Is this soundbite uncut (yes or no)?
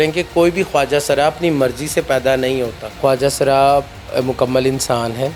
no